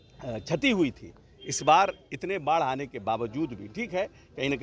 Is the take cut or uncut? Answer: uncut